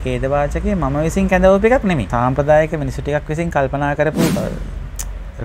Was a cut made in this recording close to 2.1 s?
yes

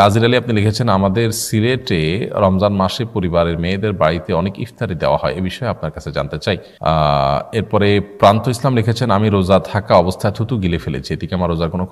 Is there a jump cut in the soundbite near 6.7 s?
yes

